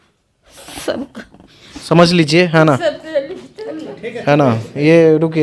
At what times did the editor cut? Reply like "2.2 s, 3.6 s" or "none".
none